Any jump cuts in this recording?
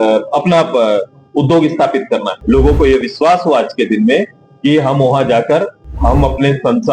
yes; 1 cut; at 2.3 s

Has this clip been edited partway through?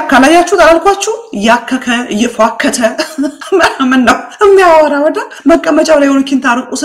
no; 0 cuts

